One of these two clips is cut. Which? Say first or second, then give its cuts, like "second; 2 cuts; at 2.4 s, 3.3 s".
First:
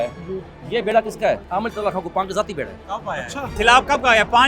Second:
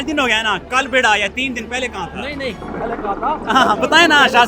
first; 2 cuts; at 1.4 s, 3.5 s